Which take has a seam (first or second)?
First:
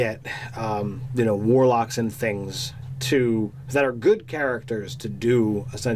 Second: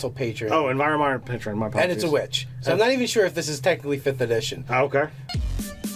second